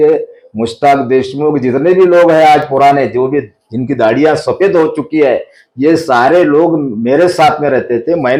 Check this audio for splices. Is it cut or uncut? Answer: uncut